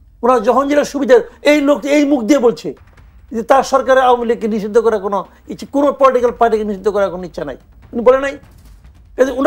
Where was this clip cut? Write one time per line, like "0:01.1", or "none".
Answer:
none